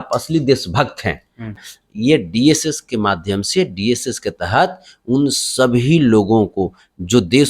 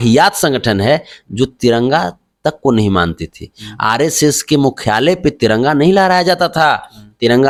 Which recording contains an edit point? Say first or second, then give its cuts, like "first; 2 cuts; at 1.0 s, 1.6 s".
first; 1 cut; at 1.6 s